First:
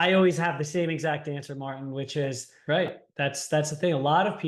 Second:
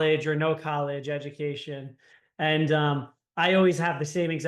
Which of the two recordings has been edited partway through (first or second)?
first